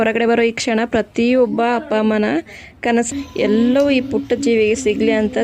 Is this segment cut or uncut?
cut